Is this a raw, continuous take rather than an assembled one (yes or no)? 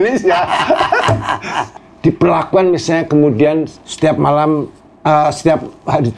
no